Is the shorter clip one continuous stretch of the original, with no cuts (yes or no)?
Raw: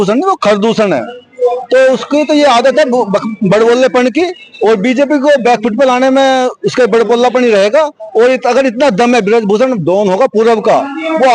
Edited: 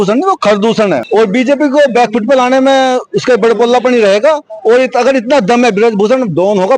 no